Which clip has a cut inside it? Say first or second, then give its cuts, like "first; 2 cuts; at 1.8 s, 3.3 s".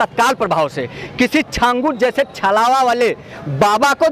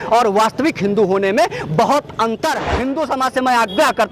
second; 1 cut; at 2.8 s